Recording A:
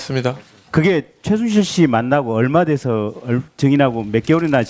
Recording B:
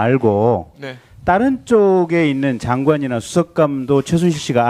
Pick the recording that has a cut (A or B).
A